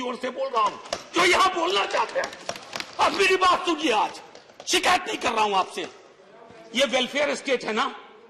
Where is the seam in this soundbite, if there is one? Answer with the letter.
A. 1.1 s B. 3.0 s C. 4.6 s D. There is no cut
D